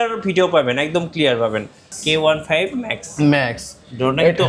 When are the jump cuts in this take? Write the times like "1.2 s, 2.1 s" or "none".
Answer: 1.9 s